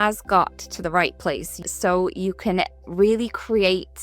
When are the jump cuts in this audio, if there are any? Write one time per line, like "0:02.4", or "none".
0:01.6